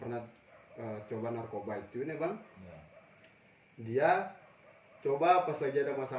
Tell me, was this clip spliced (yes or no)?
no